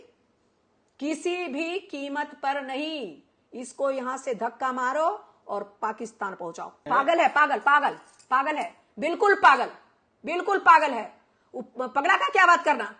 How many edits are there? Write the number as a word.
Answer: one